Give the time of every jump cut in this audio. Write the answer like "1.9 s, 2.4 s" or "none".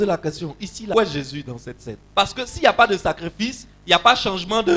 0.9 s, 1.9 s